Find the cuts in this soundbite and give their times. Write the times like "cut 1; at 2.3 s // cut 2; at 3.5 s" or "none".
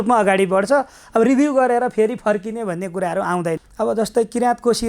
cut 1; at 3.6 s